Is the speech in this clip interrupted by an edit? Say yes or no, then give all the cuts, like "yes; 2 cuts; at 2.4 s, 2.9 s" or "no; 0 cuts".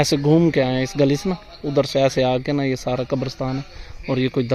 no; 0 cuts